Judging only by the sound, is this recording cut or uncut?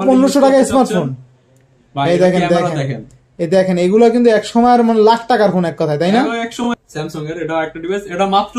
cut